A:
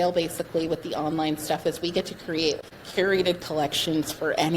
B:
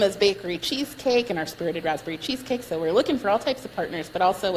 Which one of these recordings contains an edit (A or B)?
A